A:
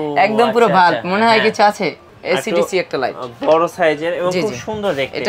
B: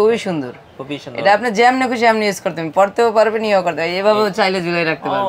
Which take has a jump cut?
A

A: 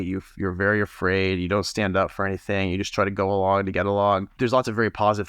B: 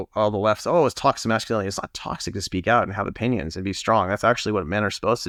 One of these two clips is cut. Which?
A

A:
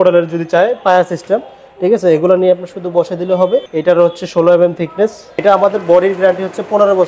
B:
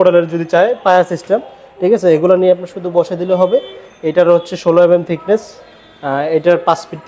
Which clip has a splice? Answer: A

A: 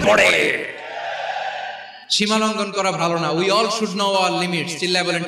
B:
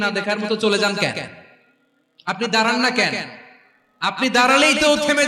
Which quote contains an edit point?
A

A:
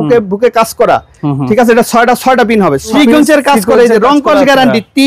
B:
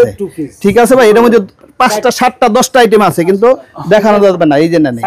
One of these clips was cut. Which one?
A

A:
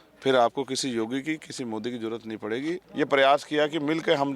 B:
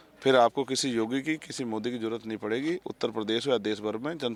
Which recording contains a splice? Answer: A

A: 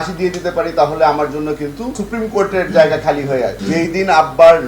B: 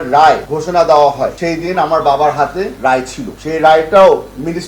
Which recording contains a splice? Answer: A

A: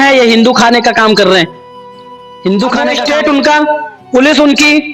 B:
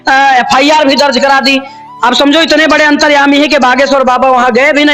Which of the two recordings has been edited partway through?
A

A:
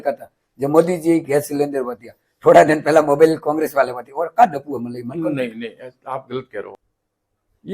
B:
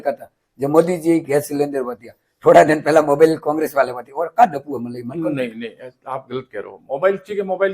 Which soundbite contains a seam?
A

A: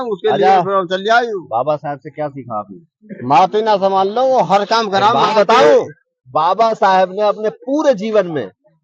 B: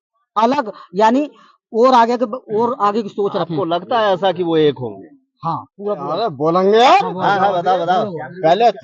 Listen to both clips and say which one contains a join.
B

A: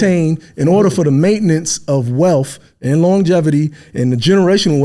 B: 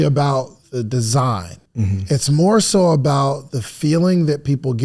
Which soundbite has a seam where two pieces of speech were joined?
B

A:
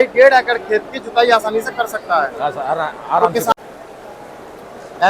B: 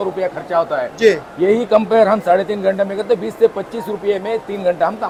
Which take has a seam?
A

